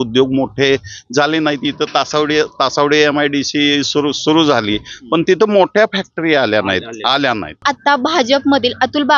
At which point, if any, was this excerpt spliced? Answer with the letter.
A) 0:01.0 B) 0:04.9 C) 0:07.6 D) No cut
C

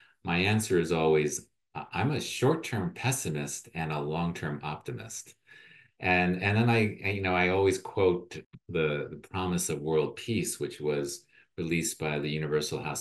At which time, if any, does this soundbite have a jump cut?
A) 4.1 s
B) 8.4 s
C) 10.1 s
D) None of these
B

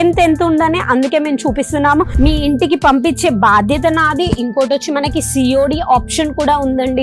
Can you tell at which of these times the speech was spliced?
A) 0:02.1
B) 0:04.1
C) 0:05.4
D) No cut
A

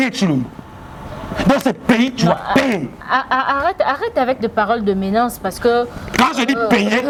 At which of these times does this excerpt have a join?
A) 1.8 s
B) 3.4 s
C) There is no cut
C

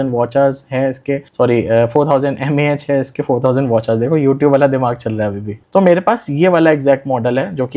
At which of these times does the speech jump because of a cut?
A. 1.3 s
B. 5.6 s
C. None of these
B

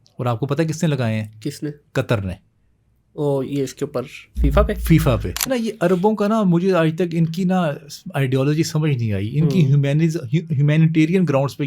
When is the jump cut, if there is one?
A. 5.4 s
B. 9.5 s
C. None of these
A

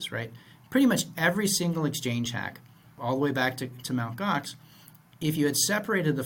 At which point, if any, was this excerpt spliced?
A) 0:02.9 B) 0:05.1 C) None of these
A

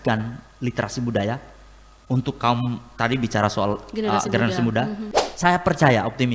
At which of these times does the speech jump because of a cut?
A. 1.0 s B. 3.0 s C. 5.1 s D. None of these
C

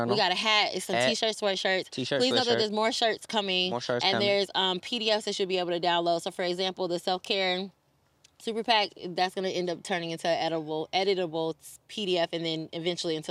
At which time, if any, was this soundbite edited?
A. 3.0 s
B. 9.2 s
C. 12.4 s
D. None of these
D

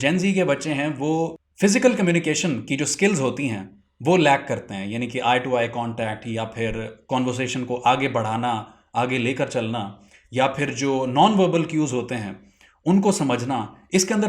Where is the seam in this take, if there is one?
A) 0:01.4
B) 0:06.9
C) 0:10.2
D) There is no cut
A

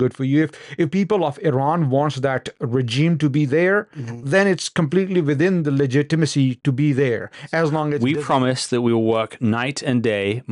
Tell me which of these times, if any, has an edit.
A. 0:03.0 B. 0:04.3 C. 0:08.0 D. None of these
C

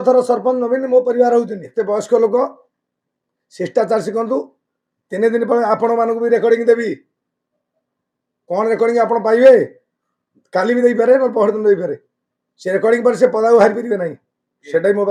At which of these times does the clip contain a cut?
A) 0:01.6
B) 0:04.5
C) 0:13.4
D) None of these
A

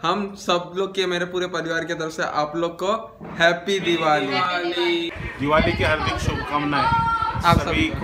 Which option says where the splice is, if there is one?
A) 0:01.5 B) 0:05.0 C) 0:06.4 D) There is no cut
B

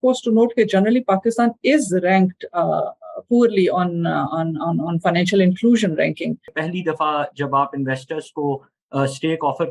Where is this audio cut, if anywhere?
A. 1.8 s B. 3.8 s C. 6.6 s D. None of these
C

